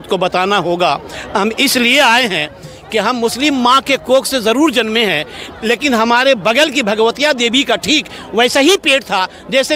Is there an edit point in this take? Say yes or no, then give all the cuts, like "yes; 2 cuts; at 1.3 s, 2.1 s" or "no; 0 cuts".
no; 0 cuts